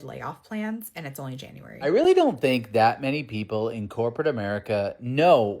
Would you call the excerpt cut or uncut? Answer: cut